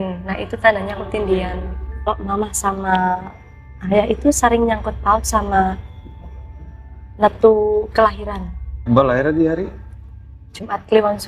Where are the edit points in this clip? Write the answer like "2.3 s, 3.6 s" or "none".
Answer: 2.1 s, 8.8 s